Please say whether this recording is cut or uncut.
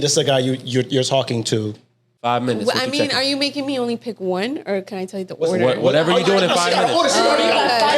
uncut